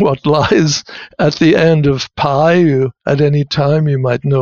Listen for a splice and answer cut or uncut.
uncut